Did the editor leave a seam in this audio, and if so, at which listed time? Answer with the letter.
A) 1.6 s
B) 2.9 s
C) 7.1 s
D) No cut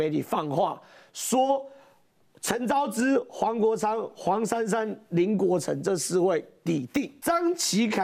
C